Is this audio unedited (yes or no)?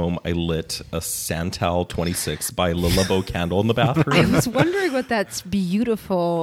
yes